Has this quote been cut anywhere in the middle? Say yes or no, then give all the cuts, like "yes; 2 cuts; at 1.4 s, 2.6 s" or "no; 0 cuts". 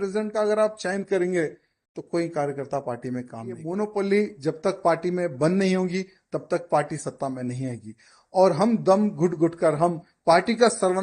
yes; 1 cut; at 3.6 s